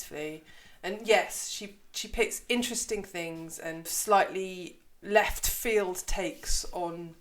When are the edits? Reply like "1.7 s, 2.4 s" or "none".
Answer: 3.9 s, 5.0 s

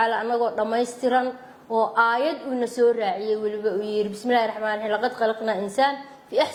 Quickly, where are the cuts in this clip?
none

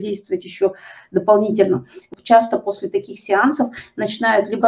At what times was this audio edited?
2.1 s

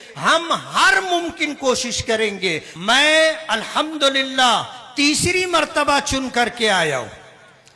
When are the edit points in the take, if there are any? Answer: 2.7 s

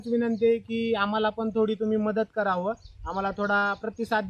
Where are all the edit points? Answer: none

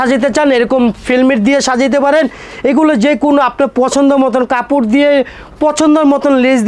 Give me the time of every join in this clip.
none

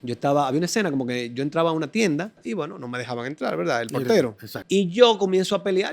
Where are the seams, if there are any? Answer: 2.4 s, 4.5 s

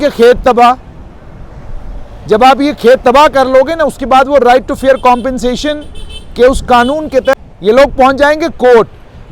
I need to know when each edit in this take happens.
7.4 s

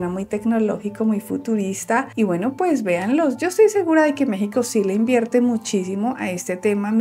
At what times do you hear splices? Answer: none

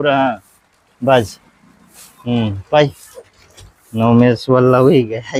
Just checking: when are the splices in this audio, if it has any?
none

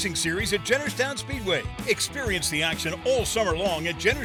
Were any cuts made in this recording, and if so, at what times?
none

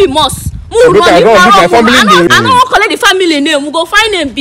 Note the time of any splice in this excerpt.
2.3 s

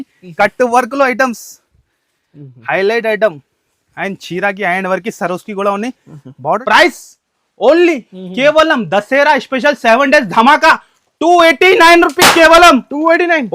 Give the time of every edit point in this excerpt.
6.6 s

